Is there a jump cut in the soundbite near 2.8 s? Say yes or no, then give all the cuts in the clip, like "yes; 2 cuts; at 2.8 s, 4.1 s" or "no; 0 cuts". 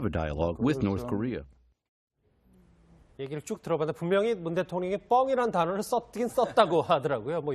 no; 1 cut; at 6.1 s